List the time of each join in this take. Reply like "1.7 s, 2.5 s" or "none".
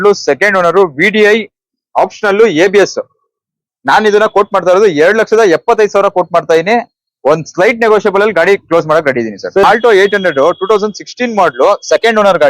9.6 s